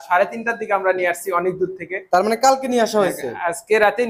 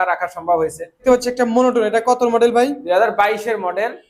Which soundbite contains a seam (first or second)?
second